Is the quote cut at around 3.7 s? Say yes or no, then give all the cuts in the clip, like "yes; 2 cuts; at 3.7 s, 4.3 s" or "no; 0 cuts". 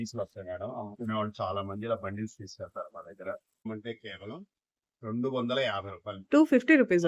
yes; 1 cut; at 3.7 s